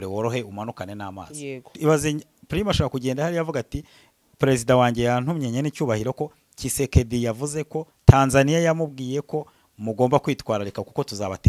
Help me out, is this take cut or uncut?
cut